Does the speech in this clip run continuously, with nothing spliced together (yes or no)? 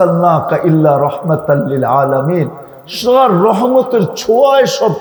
yes